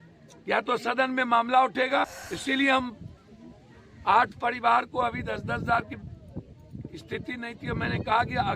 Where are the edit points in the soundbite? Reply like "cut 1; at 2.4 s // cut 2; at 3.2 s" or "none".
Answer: cut 1; at 2.2 s